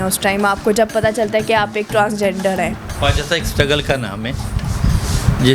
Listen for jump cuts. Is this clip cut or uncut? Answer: uncut